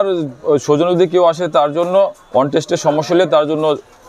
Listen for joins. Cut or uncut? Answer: uncut